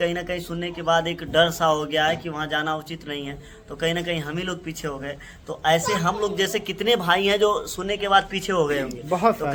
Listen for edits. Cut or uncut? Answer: uncut